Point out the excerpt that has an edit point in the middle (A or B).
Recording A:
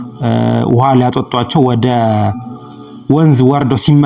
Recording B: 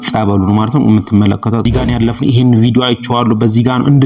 B